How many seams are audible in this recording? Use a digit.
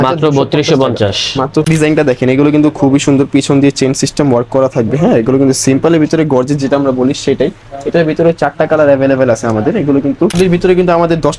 2